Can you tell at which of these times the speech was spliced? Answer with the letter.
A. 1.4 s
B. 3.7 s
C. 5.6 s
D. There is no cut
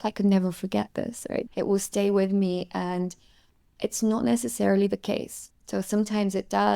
A